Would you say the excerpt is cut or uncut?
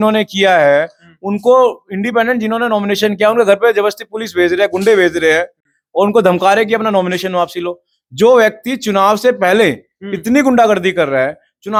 uncut